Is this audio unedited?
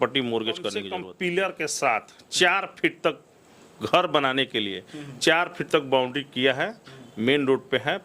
no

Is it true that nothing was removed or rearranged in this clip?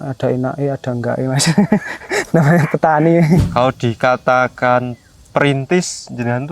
no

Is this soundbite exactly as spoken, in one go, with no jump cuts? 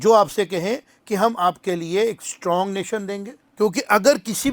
no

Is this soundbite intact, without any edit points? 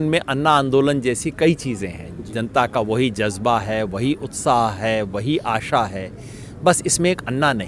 yes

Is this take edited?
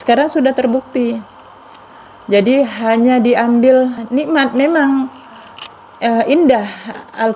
yes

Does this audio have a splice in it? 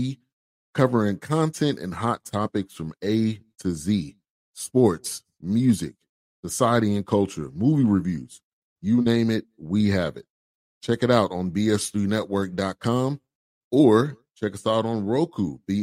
no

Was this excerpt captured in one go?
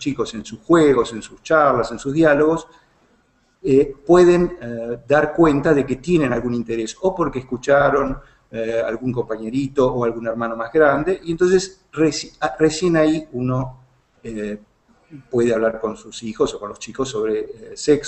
yes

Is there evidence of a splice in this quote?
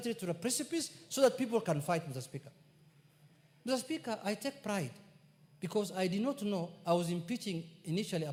no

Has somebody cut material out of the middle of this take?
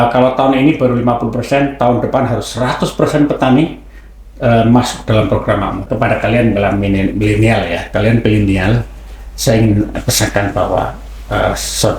yes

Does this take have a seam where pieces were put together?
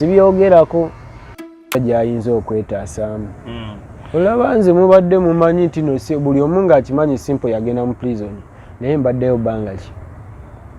yes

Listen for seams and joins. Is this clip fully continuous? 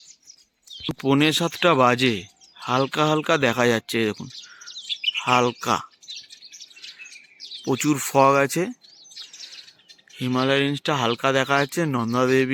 yes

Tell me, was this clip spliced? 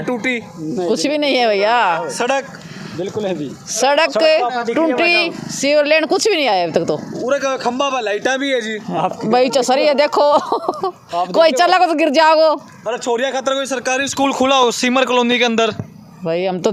no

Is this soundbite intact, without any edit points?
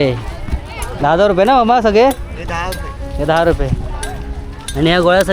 yes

